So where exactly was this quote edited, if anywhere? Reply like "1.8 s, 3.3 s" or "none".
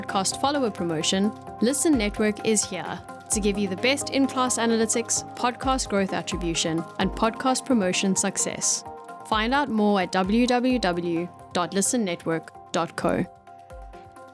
13.4 s